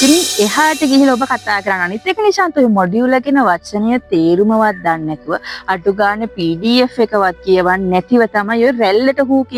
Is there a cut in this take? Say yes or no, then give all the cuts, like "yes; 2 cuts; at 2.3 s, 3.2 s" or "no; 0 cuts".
no; 0 cuts